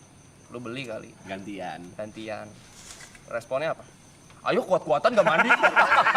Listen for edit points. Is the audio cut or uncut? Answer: uncut